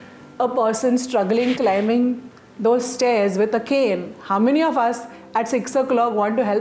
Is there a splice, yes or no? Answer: no